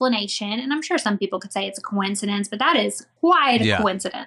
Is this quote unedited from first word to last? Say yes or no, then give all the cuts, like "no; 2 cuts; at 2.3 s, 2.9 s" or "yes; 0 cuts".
no; 1 cut; at 3.0 s